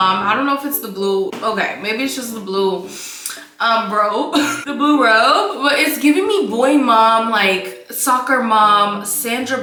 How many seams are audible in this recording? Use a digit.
0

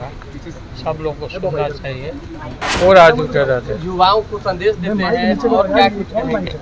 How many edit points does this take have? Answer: 1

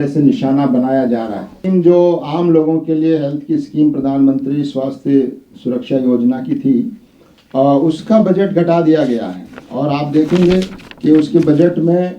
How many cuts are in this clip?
1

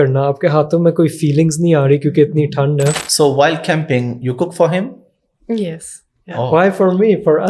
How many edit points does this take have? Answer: 1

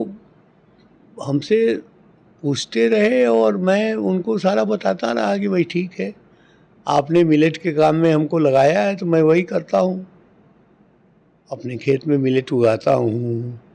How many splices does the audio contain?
0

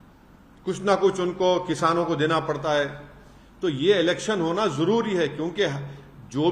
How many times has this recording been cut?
0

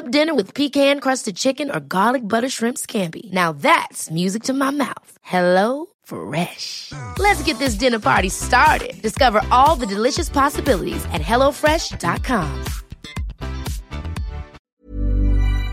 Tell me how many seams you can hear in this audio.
1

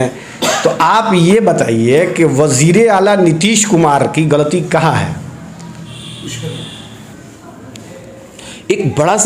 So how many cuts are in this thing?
0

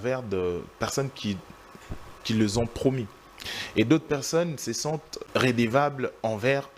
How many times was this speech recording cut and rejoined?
2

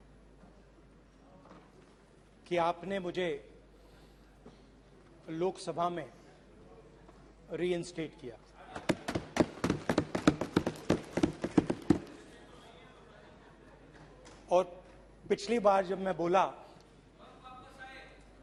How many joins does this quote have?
0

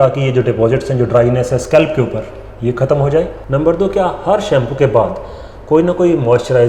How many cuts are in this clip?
1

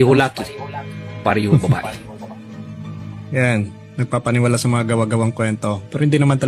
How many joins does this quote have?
0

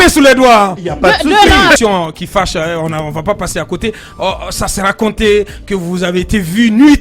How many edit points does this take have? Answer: 1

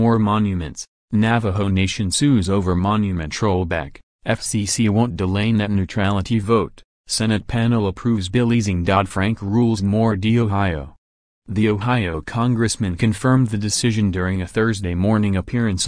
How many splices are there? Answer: 1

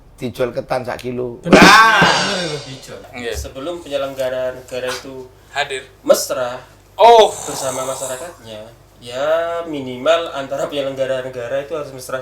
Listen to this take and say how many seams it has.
1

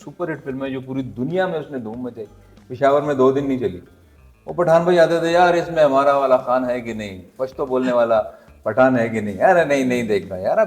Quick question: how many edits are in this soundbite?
0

